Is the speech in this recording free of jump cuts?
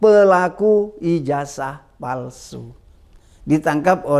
yes; 0 cuts

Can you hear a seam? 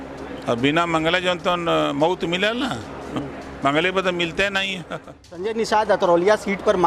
yes; 1 cut; at 5.5 s

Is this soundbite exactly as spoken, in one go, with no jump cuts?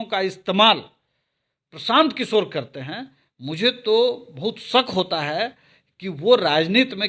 yes; 0 cuts

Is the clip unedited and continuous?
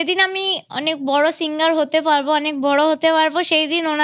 yes; 0 cuts

